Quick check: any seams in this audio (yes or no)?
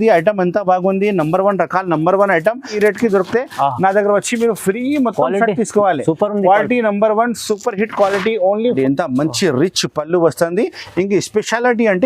yes